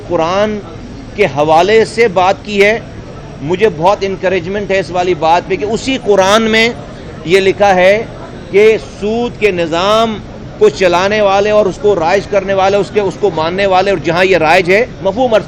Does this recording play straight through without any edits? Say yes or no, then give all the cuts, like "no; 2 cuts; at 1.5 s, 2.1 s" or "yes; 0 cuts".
yes; 0 cuts